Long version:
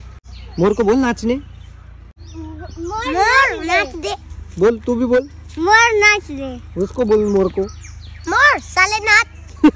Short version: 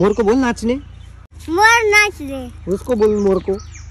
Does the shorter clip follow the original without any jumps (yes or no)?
no